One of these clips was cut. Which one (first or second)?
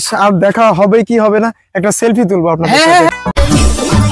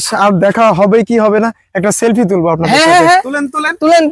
first